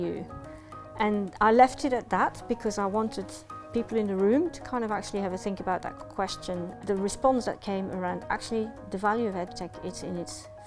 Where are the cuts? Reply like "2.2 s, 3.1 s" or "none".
6.8 s